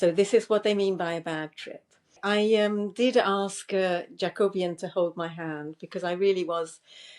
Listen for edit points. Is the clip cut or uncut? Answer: cut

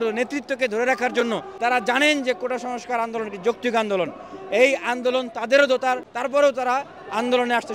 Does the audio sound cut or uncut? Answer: cut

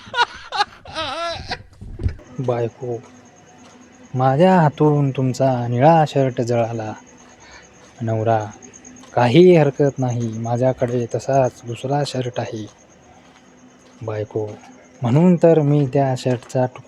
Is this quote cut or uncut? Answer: cut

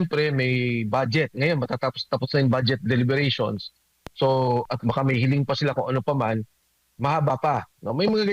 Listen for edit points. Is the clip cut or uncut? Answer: uncut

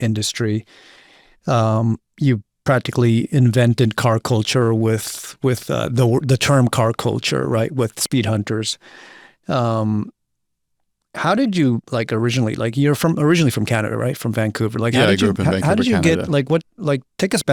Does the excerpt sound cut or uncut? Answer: uncut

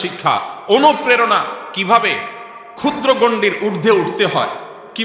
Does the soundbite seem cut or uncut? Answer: uncut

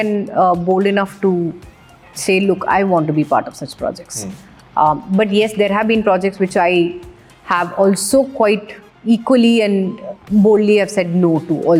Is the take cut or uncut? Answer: uncut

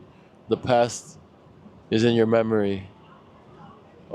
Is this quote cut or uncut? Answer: uncut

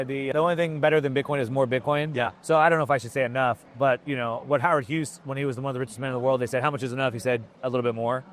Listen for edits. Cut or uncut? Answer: uncut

